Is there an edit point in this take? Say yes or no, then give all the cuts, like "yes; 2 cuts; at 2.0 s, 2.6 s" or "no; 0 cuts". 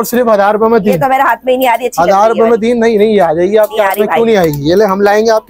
no; 0 cuts